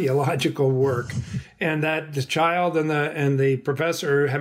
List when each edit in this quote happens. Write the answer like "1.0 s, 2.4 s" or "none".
none